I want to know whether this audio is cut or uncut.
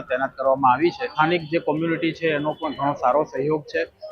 cut